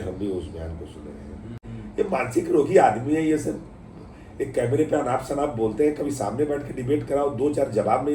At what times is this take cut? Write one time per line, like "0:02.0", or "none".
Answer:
0:01.5